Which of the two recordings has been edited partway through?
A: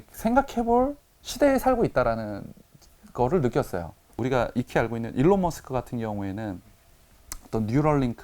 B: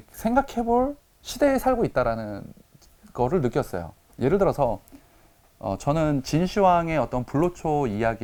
A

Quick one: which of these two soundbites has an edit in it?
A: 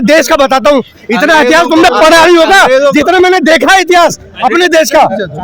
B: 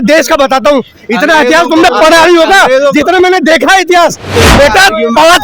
B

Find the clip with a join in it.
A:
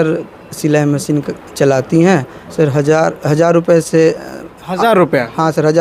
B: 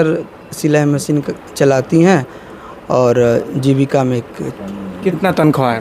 A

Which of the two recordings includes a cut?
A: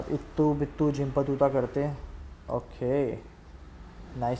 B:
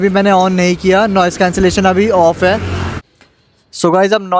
B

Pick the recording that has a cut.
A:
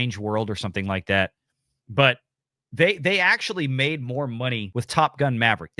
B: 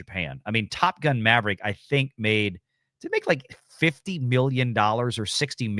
A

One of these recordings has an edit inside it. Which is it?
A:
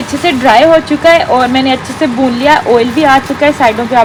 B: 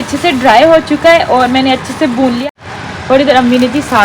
B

